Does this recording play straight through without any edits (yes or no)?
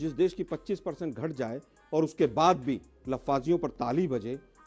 yes